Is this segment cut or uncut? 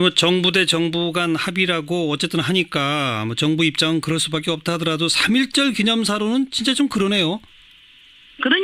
cut